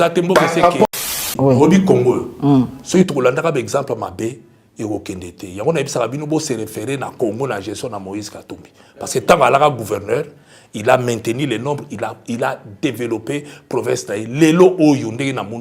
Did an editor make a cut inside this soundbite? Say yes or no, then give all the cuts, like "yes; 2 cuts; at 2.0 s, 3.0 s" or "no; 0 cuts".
yes; 1 cut; at 1.2 s